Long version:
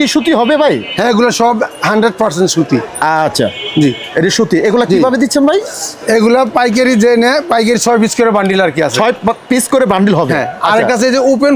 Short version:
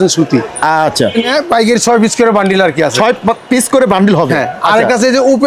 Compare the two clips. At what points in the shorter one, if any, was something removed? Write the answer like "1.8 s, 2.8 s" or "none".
1.3 s